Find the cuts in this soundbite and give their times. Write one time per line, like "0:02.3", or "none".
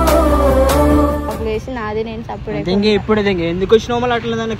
0:01.3